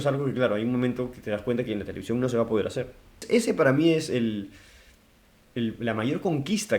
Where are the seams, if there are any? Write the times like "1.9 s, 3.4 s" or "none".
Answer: 3.2 s

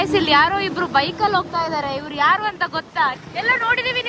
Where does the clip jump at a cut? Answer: 3.2 s

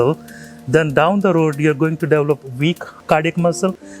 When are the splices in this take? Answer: 2.9 s

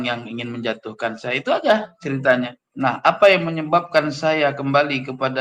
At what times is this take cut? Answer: 2.6 s

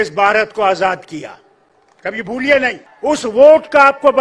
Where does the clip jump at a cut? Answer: 2.9 s

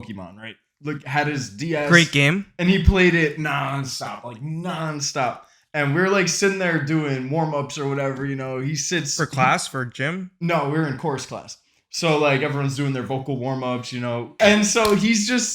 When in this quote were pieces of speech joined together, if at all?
14.2 s

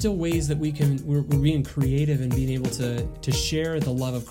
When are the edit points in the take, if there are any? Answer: 3.1 s

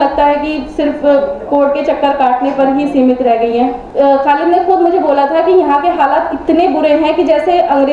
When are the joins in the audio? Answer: 3.8 s

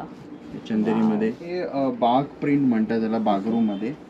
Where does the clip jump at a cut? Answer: 1.6 s

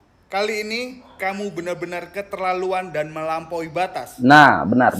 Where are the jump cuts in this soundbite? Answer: 4.1 s

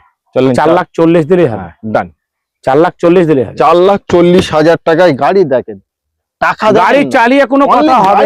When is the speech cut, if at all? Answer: none

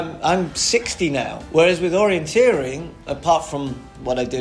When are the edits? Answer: 1.4 s, 3.1 s

